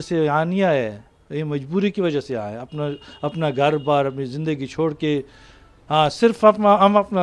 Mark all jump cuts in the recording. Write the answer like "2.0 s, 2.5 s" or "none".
none